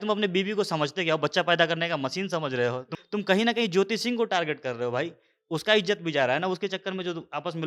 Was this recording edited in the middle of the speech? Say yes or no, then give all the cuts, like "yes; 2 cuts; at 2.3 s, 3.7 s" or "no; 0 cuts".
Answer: yes; 1 cut; at 2.9 s